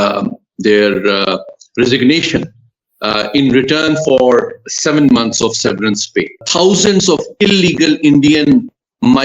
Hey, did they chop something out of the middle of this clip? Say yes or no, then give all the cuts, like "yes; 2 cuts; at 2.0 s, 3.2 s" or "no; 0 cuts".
yes; 1 cut; at 6.4 s